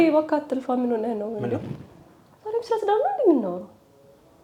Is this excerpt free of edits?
yes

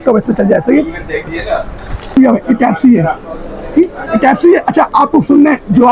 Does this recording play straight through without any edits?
no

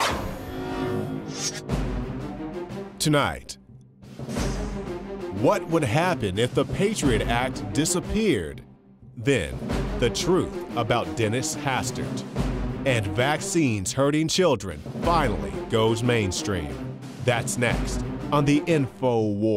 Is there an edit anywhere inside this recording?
no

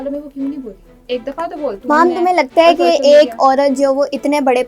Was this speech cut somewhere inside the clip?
yes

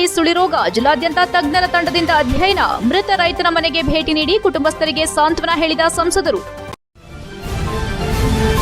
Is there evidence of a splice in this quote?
yes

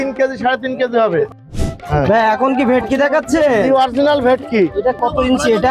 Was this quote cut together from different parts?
yes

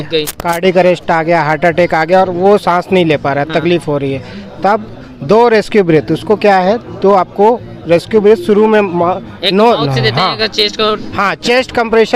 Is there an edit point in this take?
no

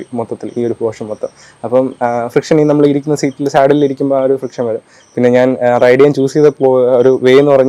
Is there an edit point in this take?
no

